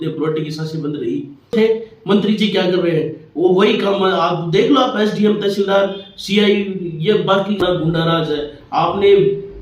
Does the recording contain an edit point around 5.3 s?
no; 2 cuts; at 1.5 s, 7.6 s

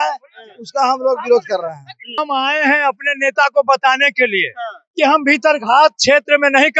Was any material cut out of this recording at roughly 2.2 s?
yes; 1 cut; at 2.2 s

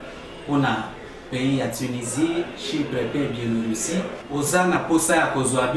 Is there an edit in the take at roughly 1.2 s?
no; 0 cuts

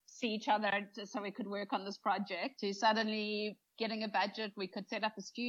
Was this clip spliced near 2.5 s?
yes; 1 cut; at 2.5 s

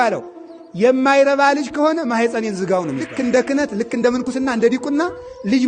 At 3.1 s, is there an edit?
yes; 1 cut; at 3.1 s

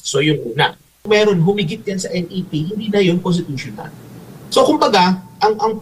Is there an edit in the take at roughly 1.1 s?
yes; 1 cut; at 1.1 s

